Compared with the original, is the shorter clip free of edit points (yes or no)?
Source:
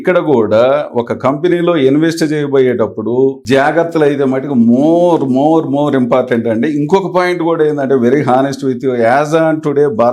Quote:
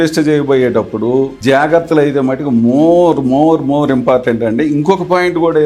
yes